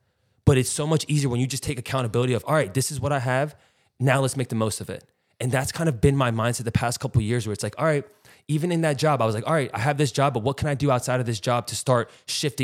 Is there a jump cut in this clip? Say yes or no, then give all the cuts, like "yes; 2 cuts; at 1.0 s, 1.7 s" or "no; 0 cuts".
no; 0 cuts